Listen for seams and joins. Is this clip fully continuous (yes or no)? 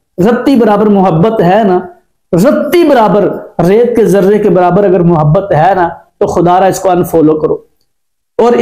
yes